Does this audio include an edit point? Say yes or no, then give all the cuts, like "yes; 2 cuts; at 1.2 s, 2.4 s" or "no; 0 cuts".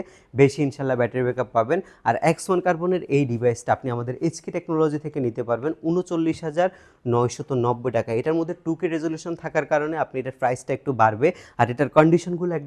no; 0 cuts